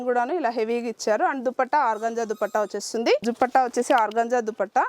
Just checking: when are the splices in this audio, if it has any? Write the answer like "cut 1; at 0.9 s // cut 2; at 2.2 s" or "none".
cut 1; at 3.2 s